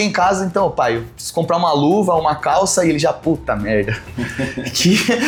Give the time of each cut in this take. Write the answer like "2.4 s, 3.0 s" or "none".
none